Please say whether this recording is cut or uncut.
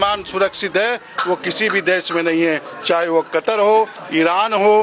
uncut